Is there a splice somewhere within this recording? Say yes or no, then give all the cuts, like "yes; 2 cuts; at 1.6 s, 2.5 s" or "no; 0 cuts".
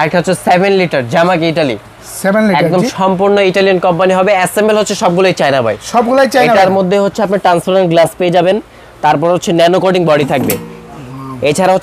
no; 0 cuts